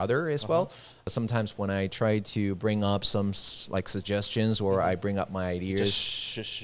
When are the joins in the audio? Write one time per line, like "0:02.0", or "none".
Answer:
0:01.1